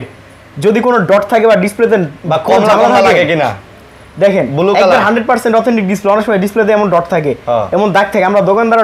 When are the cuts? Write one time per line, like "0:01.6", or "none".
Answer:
none